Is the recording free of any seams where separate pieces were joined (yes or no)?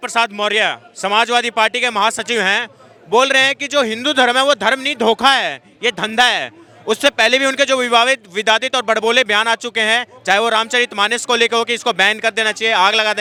yes